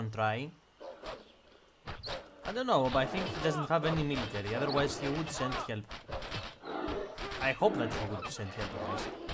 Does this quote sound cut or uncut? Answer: uncut